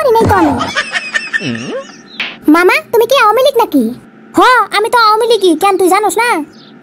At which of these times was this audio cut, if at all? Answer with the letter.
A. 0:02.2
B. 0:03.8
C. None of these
A